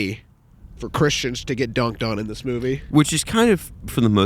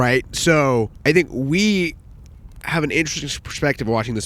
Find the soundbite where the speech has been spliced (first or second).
second